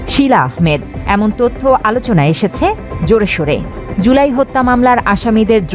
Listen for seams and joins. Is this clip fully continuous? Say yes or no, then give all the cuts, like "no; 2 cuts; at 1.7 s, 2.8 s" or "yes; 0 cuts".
no; 1 cut; at 3.8 s